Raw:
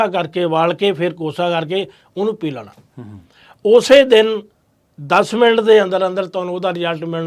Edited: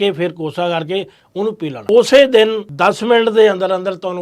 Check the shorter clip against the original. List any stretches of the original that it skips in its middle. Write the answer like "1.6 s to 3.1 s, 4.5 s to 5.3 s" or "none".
2.7 s to 3.6 s, 4.4 s to 5.0 s